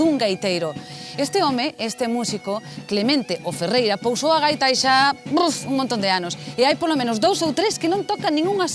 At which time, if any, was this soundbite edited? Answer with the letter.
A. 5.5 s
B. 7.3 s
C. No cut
C